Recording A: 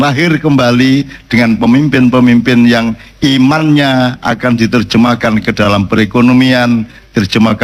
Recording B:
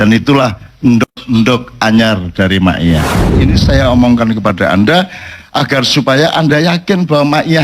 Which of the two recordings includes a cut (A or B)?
B